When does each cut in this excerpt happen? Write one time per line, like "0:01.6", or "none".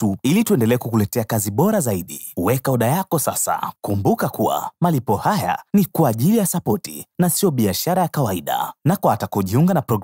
0:03.7